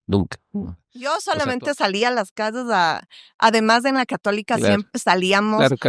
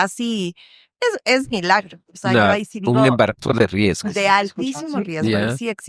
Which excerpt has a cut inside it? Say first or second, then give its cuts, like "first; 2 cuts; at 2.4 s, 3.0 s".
first; 1 cut; at 0.9 s